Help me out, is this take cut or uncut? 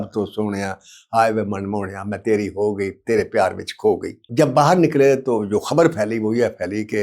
cut